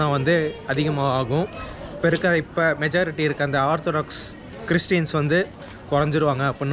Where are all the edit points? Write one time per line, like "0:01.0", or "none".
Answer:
none